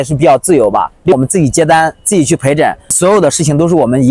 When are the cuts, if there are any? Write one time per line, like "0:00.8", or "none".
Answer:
0:01.1
0:02.9